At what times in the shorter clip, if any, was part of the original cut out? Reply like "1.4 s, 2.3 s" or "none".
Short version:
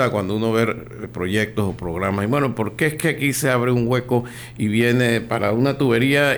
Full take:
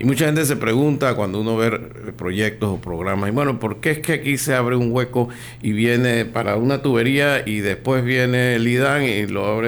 none